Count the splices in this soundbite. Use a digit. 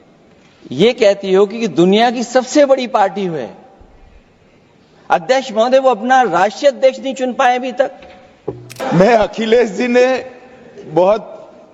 1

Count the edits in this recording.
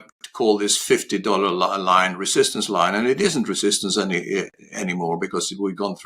0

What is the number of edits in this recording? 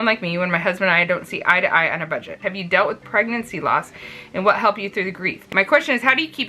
2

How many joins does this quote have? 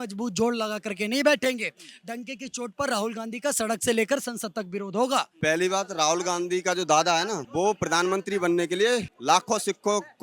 2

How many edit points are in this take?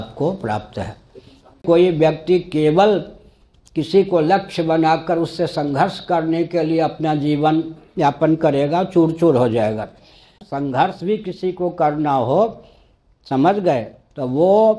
2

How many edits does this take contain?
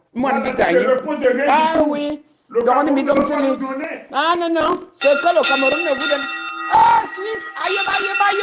0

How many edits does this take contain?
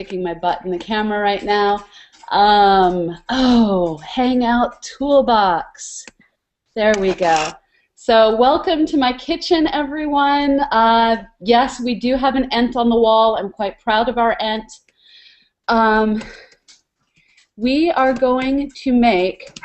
1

